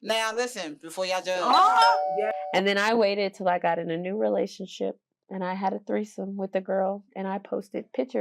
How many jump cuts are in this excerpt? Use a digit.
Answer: 1